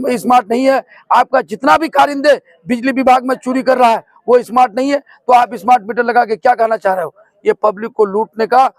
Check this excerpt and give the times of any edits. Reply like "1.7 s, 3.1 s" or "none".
none